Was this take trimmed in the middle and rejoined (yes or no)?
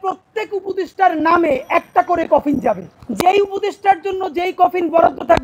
yes